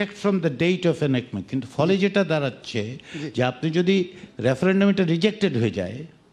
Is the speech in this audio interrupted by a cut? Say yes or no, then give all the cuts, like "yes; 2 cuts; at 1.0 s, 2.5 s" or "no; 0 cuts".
no; 0 cuts